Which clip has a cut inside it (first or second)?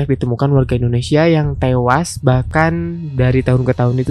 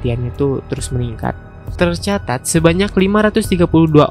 second